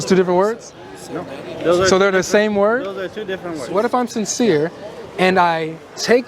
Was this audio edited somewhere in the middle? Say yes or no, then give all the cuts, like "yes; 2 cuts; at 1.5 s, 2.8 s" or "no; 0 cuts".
yes; 1 cut; at 3.8 s